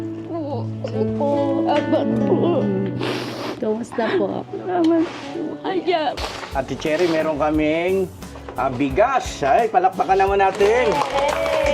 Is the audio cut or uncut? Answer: cut